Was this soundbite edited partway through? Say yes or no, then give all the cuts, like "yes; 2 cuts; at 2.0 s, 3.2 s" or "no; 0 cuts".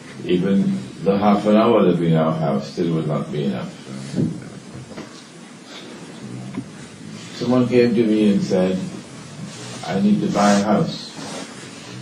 yes; 1 cut; at 8.2 s